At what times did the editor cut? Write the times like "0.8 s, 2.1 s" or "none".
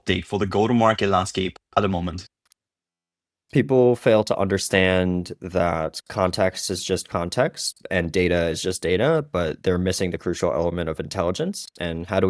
none